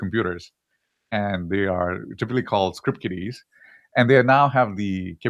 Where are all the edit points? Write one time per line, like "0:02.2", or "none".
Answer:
0:01.7